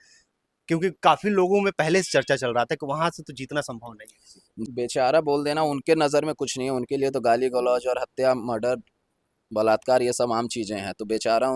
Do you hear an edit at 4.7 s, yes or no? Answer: yes